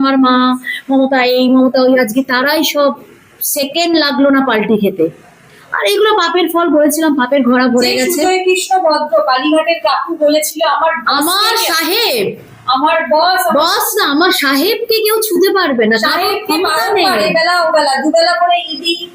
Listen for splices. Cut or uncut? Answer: uncut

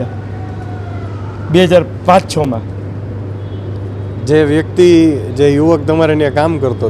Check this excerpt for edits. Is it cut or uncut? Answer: uncut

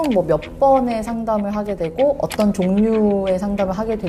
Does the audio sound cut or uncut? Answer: uncut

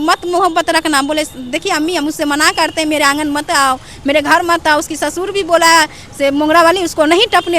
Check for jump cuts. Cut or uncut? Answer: uncut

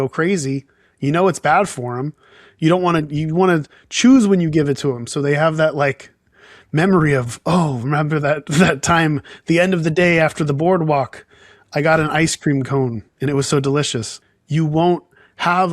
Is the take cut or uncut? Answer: cut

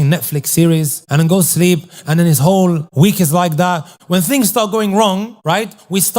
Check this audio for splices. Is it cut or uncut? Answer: cut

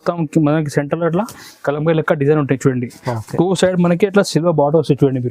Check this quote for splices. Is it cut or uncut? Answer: uncut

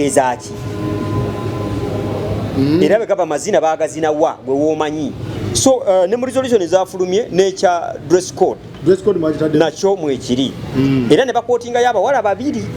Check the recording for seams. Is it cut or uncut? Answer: cut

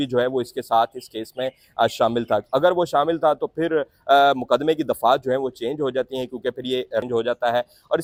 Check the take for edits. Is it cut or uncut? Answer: uncut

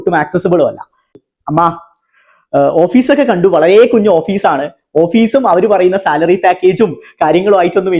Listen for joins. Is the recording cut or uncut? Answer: cut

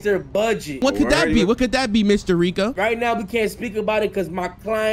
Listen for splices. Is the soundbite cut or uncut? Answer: cut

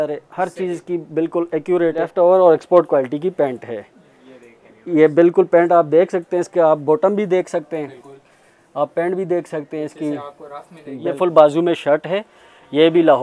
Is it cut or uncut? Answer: cut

